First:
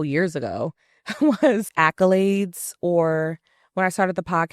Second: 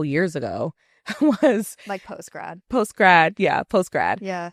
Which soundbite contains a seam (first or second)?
first